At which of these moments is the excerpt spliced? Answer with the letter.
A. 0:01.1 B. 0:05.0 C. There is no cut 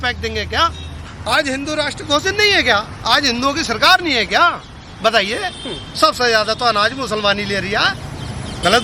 A